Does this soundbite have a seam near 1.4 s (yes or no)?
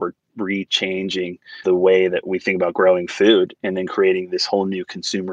yes